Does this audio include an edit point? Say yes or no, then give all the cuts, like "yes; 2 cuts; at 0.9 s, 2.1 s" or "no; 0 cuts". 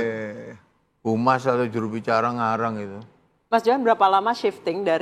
no; 0 cuts